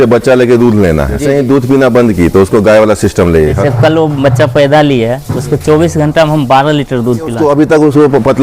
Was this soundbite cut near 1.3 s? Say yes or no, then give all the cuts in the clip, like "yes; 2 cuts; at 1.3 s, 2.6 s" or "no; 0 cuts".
yes; 3 cuts; at 1.3 s, 3.6 s, 7.3 s